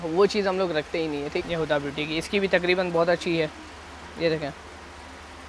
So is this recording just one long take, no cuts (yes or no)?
no